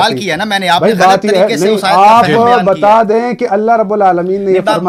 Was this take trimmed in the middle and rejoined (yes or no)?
no